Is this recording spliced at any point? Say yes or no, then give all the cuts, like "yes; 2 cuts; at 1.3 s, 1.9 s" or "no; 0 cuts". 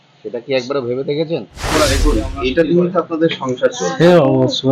yes; 1 cut; at 1.7 s